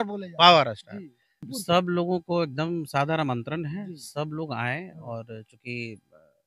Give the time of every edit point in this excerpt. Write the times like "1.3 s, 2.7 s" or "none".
1.5 s